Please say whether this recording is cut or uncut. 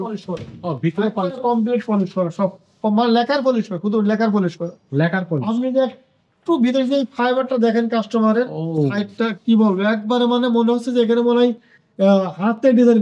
uncut